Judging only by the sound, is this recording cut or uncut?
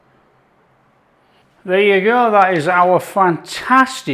cut